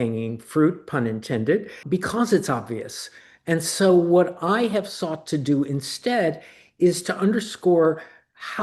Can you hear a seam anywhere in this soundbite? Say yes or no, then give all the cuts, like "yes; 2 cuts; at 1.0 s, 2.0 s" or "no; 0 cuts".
yes; 1 cut; at 1.8 s